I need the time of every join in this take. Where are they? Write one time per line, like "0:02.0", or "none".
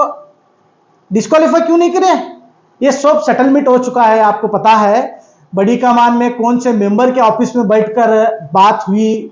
none